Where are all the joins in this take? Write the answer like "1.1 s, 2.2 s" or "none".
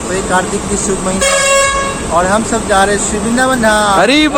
none